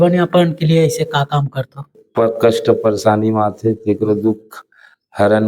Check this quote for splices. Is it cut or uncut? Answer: cut